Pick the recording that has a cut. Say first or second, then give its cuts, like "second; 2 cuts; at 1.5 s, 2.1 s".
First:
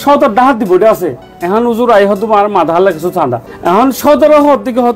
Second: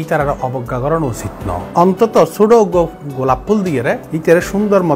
second; 2 cuts; at 1.6 s, 4.1 s